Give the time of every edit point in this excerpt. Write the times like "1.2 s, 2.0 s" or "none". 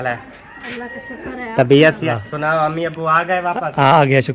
2.1 s